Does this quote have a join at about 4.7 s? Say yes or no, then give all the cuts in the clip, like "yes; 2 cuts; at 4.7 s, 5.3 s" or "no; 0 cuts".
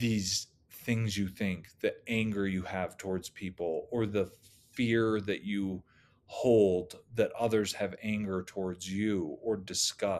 no; 0 cuts